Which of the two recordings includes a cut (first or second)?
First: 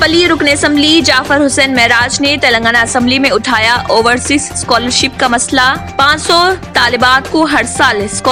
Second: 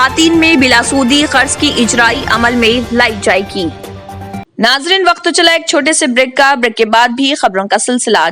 second